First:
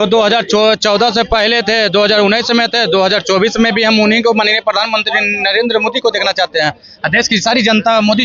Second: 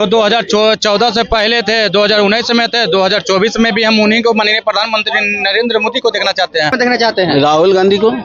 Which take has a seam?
second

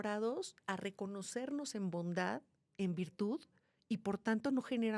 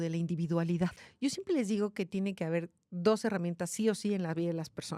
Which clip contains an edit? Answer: second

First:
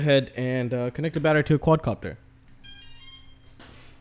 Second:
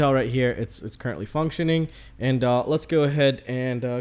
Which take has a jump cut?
first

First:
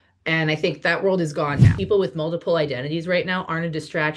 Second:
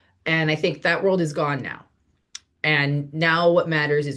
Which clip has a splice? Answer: first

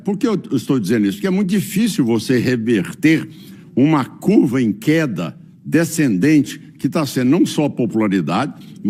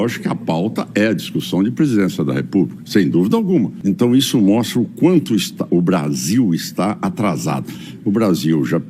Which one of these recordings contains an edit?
second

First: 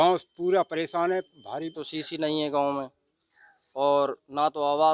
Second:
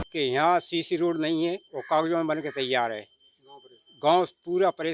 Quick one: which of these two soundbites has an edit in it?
first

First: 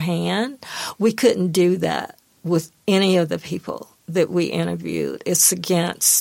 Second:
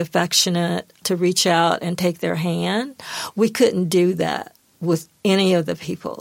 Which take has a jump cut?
second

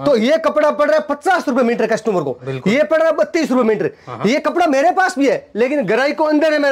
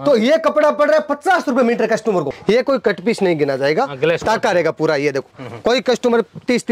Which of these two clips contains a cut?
second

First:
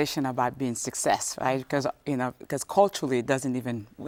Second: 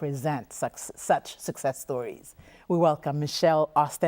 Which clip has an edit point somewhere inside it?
second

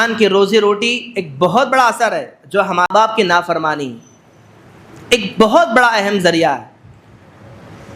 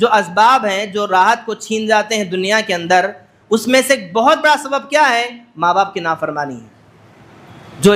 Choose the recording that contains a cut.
first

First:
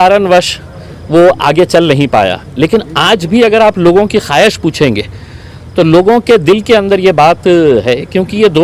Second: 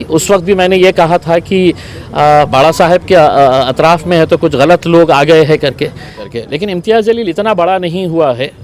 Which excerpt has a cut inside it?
second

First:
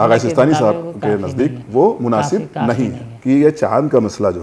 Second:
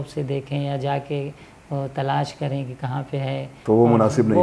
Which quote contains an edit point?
first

